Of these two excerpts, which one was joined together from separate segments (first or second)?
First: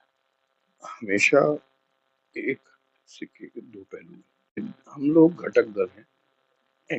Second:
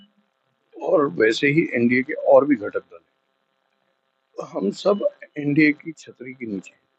first